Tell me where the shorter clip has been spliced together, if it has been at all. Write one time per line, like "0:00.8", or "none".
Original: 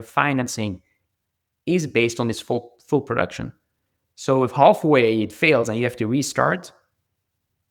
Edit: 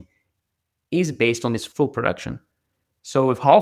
0:01.6